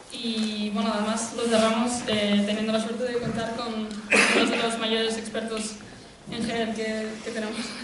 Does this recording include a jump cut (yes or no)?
no